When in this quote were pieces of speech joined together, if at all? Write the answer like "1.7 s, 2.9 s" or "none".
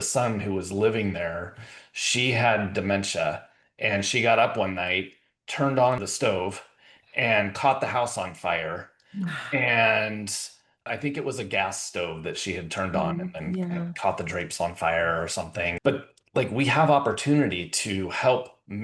6.0 s, 10.9 s, 15.7 s